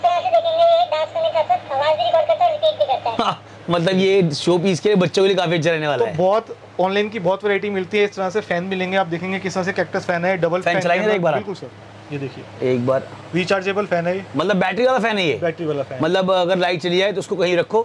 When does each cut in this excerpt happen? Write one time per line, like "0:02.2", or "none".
none